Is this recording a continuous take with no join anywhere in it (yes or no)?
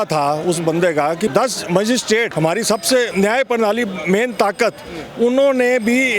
no